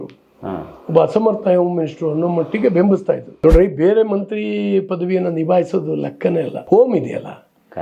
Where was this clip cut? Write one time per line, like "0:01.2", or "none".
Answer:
0:03.3
0:06.6